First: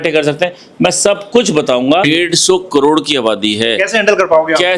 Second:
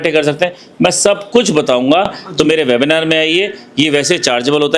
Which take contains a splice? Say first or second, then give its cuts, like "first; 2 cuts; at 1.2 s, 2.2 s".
first; 1 cut; at 2.0 s